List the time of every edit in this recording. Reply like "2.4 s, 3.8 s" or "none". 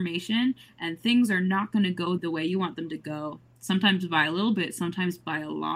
2.1 s